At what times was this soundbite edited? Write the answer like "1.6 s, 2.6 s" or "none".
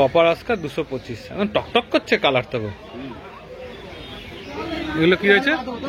4.5 s